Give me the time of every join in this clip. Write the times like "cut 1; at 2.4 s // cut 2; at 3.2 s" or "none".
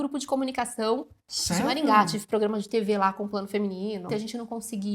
cut 1; at 4.0 s